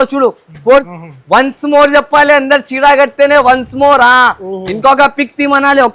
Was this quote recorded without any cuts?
no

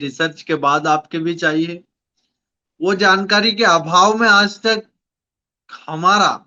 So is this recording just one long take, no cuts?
yes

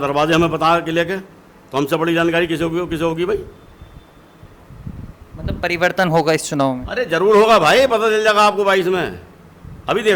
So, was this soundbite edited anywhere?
no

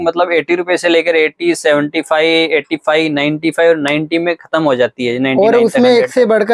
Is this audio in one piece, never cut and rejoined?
yes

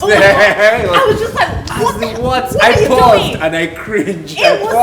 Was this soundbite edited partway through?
no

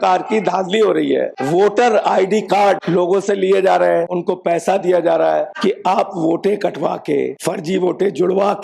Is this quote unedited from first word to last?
no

